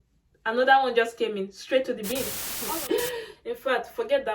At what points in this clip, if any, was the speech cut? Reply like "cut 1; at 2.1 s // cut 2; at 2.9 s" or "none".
cut 1; at 2.5 s